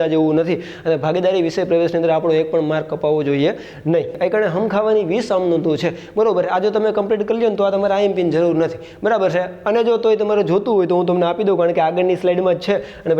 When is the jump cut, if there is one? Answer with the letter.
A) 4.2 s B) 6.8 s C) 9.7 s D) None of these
A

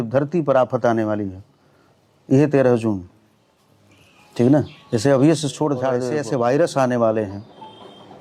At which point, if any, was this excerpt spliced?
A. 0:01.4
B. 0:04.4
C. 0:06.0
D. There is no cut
C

